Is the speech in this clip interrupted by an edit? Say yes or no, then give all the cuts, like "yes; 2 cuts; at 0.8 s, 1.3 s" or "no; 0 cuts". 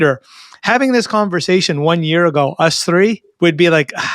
yes; 1 cut; at 3.3 s